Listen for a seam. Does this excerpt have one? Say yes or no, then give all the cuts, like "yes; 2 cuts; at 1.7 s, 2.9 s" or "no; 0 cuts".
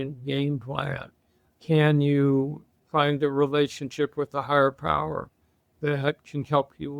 yes; 1 cut; at 1.5 s